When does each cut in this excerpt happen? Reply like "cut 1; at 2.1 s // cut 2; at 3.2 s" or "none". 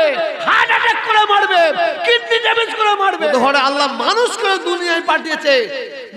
cut 1; at 3.3 s